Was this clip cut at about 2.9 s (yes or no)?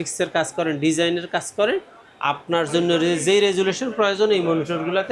no